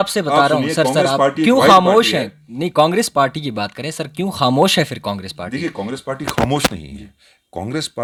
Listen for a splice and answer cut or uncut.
uncut